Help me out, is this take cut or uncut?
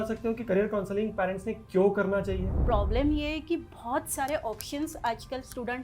cut